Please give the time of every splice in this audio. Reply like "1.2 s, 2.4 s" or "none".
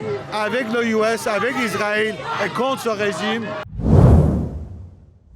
3.7 s